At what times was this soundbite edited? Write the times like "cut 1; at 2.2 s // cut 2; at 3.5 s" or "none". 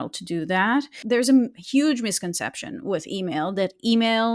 cut 1; at 1.0 s